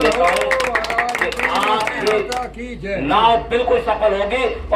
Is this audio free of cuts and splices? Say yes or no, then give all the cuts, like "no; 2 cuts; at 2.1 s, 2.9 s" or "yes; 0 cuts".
yes; 0 cuts